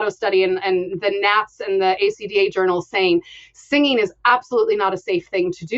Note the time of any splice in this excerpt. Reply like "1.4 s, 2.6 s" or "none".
none